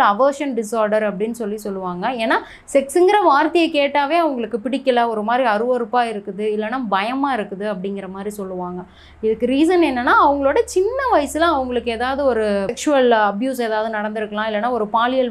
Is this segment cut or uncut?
uncut